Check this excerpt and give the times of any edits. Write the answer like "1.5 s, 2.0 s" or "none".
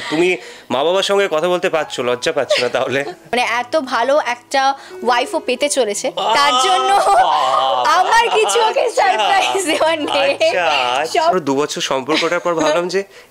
3.3 s, 11.3 s